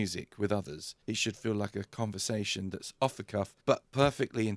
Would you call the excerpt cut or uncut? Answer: uncut